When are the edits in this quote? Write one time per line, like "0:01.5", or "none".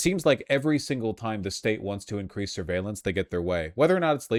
none